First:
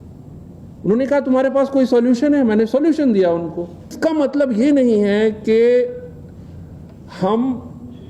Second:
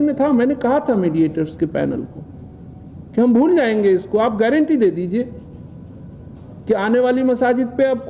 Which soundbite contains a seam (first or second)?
first